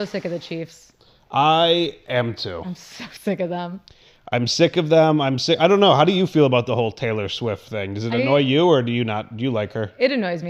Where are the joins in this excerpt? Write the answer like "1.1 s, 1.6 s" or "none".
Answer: none